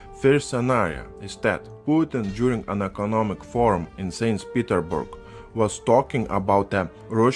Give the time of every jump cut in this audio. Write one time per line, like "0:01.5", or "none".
none

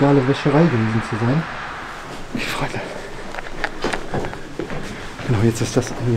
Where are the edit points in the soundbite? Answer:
0:02.0

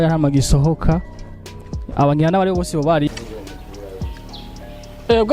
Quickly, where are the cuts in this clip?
0:03.1

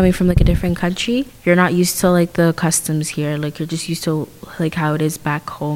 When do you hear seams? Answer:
none

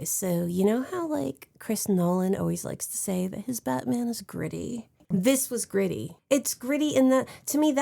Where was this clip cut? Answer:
0:05.0
0:06.1

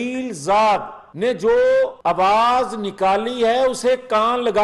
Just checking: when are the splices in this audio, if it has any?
0:01.0
0:02.0

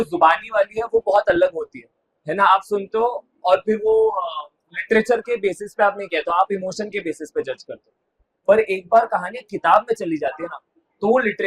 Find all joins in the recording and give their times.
none

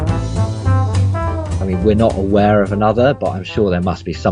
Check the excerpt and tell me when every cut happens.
0:01.6

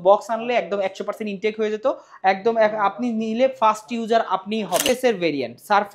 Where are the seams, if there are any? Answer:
0:04.9

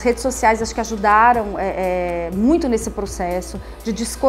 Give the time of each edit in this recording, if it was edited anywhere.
none

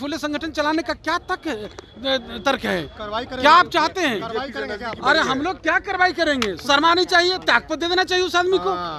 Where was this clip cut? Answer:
none

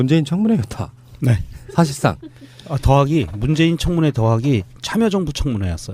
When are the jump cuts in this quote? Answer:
none

